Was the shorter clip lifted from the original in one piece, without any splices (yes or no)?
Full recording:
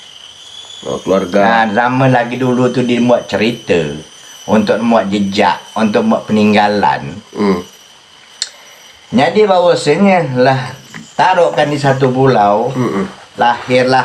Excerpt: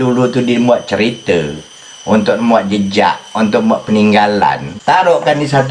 no